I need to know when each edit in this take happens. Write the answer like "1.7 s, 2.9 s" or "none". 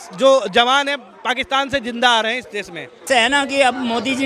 2.9 s